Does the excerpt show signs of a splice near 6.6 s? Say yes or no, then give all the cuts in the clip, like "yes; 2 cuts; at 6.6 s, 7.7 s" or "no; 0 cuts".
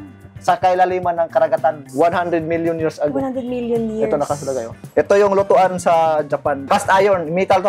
yes; 2 cuts; at 4.9 s, 6.6 s